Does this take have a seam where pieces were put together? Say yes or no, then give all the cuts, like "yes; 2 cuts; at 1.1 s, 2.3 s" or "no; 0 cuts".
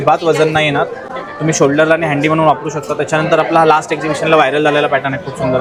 no; 0 cuts